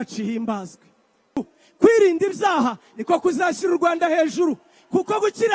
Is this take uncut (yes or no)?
no